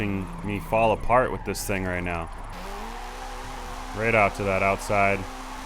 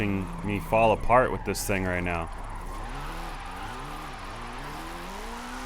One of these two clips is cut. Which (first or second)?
first